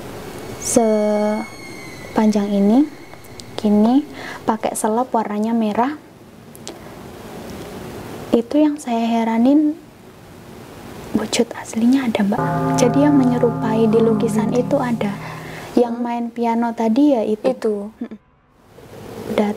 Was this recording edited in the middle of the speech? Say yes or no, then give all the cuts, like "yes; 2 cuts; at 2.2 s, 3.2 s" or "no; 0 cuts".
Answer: yes; 1 cut; at 18.2 s